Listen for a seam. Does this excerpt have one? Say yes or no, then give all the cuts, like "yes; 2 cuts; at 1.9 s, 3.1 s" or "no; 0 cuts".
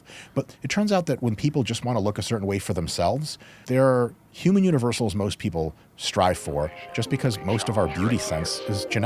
yes; 1 cut; at 3.6 s